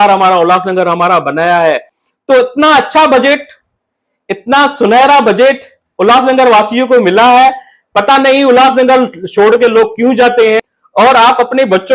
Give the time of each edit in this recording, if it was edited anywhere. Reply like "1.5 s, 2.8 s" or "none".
1.9 s, 10.8 s